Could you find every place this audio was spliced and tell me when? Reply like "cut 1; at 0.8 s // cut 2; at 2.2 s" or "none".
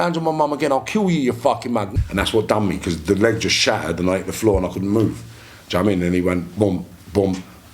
cut 1; at 1.9 s